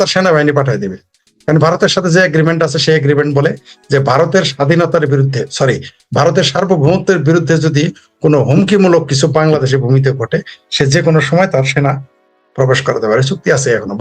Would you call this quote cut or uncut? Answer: uncut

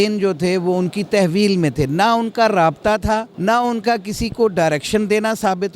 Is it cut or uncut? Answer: cut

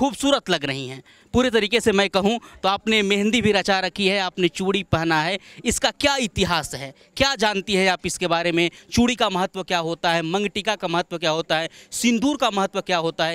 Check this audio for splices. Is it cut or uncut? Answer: uncut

